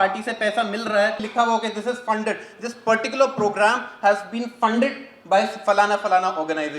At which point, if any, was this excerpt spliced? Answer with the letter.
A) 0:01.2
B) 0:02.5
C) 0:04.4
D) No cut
A